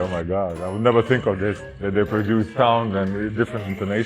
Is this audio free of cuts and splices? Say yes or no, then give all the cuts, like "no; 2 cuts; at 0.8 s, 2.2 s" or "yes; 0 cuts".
no; 1 cut; at 1.7 s